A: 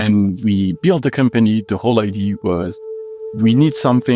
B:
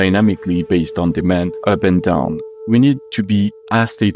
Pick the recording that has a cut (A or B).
B